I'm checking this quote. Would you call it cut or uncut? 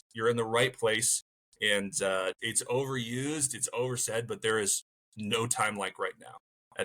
cut